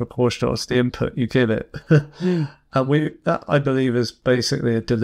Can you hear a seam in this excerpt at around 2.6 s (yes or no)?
no